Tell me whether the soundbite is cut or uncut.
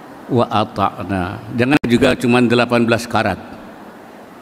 cut